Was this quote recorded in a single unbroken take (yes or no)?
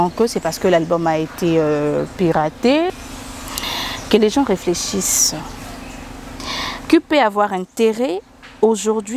no